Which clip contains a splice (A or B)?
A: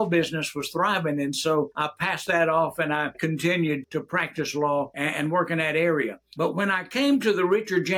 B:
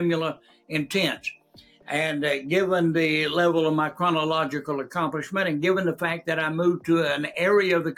A